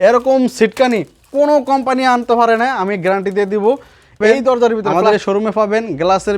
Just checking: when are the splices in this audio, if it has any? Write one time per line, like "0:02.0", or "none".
0:04.9